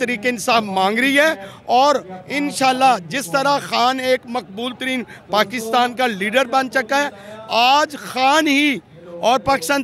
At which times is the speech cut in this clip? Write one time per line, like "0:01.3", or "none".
none